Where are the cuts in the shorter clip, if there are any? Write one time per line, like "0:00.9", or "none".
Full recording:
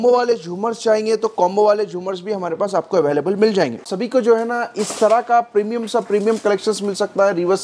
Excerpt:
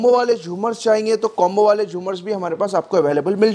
none